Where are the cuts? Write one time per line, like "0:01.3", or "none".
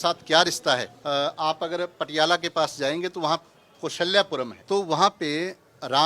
0:00.9
0:04.6